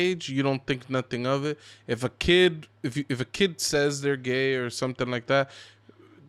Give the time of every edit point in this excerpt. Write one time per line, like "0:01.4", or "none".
none